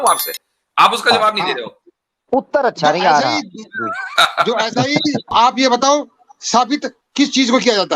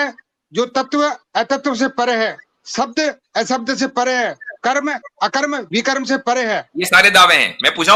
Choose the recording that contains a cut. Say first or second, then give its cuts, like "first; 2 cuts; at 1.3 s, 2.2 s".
first; 2 cuts; at 5.3 s, 7.0 s